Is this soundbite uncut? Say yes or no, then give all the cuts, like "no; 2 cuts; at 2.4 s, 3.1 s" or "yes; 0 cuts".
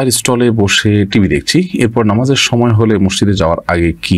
yes; 0 cuts